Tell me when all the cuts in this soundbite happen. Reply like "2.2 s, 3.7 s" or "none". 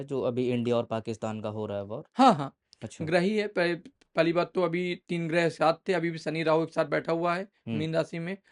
none